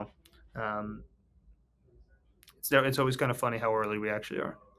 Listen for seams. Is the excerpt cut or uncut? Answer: uncut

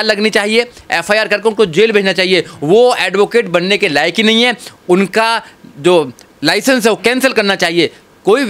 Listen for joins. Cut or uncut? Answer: uncut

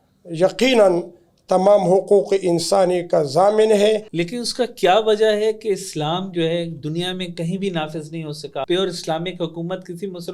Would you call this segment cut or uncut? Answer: cut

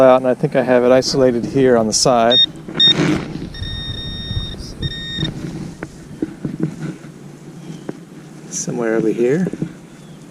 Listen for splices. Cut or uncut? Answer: uncut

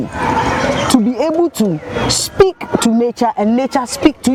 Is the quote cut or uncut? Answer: uncut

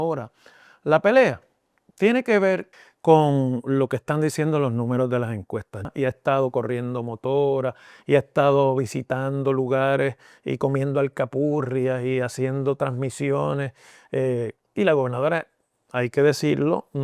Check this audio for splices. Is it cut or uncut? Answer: cut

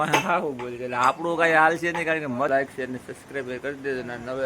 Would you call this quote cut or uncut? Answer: cut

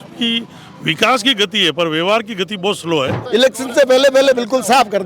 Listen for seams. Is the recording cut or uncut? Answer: cut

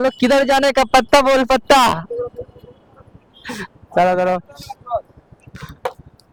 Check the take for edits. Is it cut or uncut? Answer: uncut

